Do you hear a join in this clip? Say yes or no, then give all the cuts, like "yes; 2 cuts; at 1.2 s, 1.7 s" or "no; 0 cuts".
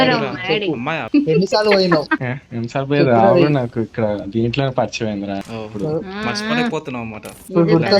yes; 2 cuts; at 0.9 s, 5.5 s